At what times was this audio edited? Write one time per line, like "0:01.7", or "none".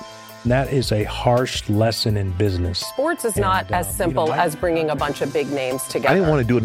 none